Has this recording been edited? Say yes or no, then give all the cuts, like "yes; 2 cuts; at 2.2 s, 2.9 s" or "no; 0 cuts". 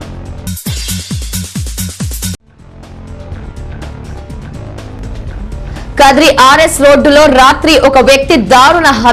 yes; 2 cuts; at 4.4 s, 5.9 s